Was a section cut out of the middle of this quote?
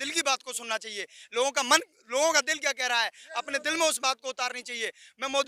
no; 0 cuts

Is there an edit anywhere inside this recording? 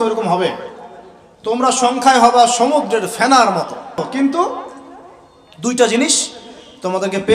yes; 1 cut; at 4.0 s

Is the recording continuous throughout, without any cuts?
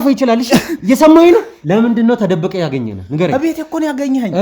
no; 1 cut; at 1.5 s

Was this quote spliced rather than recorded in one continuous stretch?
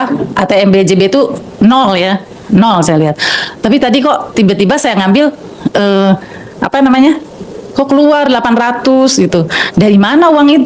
no; 0 cuts

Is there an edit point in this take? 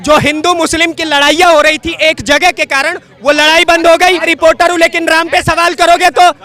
yes; 1 cut; at 4.3 s

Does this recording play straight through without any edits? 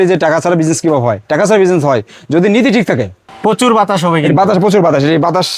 no; 1 cut; at 3.2 s

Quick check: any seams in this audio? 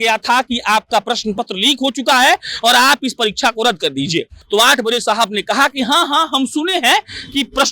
yes; 1 cut; at 4.4 s

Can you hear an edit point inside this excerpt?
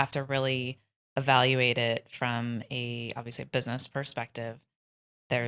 no; 0 cuts

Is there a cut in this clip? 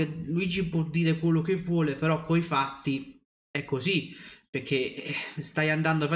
no; 0 cuts

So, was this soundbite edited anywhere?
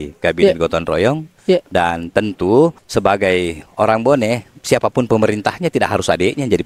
yes; 1 cut; at 2.8 s

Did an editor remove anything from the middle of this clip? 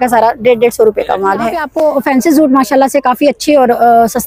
yes; 1 cut; at 1.6 s

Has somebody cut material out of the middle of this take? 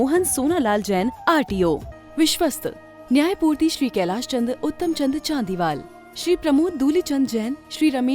yes; 1 cut; at 1.9 s

